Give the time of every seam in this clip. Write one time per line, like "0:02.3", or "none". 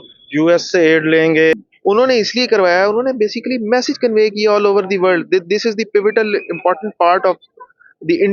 0:01.5